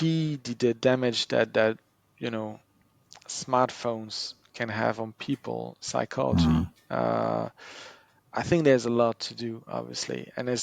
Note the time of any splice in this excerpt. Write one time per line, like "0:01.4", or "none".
none